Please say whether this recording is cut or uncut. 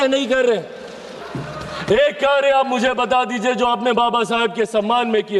cut